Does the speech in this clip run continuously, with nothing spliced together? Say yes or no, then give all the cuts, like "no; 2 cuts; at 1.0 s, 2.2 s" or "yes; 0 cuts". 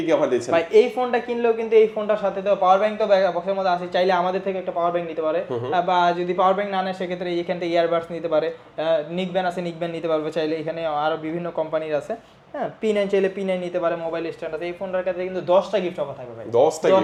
yes; 0 cuts